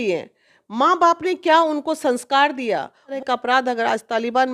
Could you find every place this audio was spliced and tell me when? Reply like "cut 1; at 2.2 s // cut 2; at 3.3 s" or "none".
cut 1; at 3.2 s